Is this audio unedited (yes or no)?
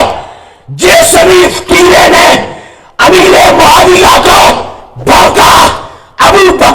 yes